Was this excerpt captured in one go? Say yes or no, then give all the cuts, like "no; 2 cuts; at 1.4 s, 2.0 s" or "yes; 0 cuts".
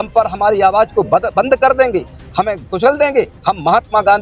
yes; 0 cuts